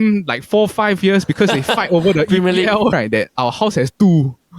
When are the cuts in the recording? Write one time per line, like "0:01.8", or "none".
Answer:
0:02.9